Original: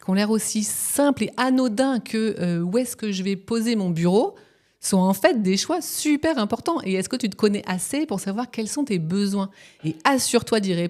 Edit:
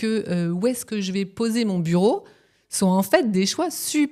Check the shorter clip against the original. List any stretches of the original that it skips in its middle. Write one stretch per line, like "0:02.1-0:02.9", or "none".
none